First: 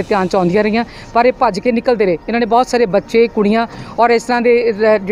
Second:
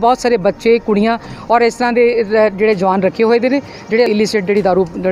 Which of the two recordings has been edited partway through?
second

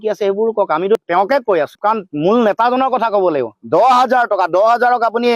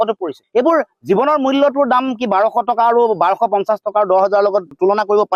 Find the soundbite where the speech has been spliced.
first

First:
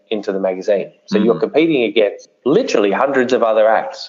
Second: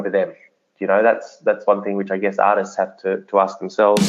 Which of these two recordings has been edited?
first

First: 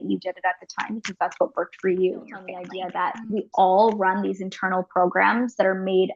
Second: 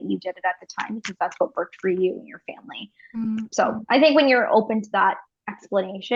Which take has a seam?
first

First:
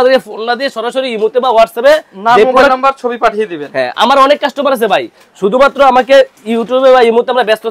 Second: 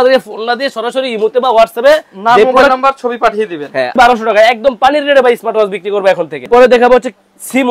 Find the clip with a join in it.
second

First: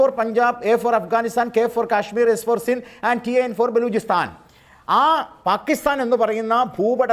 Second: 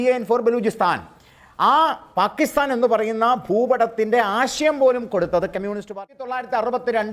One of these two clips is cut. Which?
second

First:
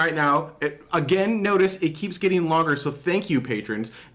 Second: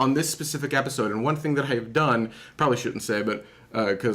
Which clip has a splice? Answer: second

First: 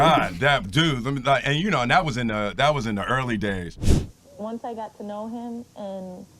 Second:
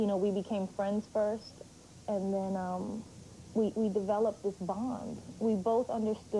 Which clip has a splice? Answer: first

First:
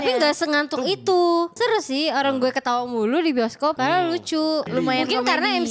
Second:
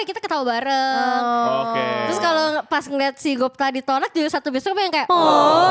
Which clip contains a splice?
first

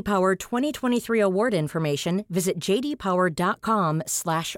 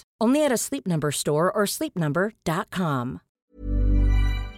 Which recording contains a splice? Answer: second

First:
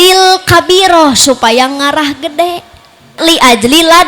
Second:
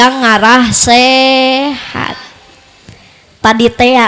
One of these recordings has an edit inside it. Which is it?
first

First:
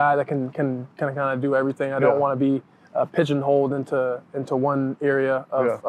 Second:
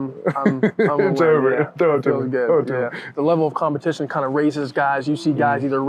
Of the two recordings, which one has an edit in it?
second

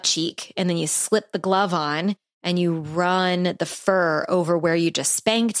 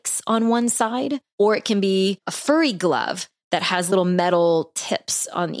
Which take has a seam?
second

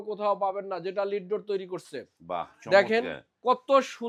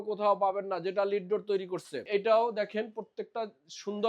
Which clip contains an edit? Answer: second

